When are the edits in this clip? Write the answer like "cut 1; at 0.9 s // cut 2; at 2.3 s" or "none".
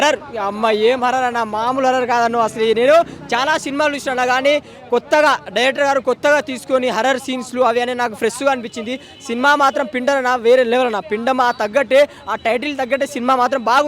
none